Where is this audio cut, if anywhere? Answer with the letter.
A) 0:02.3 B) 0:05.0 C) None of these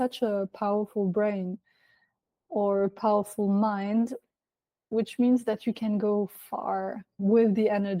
C